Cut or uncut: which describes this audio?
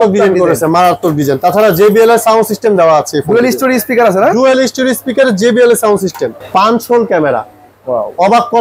cut